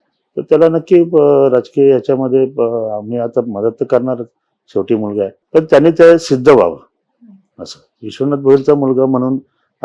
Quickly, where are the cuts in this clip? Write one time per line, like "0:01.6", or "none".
0:05.4